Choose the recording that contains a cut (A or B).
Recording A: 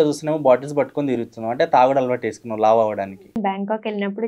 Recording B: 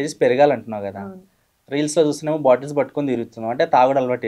A